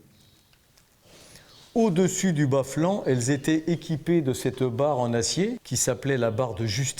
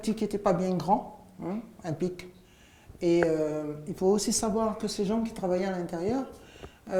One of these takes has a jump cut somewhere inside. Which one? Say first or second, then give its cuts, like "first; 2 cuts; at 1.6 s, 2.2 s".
first; 1 cut; at 5.7 s